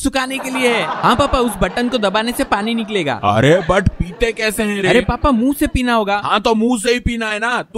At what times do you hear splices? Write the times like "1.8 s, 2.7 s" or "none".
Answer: none